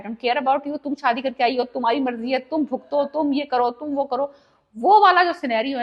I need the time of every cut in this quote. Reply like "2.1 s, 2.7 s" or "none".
none